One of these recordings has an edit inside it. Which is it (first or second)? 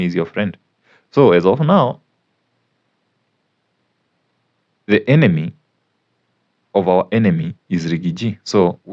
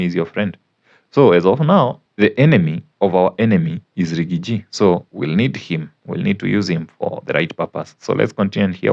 second